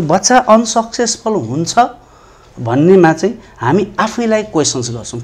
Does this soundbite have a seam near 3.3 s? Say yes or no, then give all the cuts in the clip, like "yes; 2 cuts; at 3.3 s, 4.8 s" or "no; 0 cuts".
no; 0 cuts